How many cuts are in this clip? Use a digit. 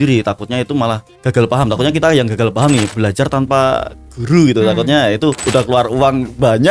3